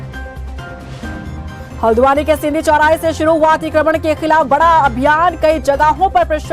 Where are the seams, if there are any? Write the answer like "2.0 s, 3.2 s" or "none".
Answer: 1.1 s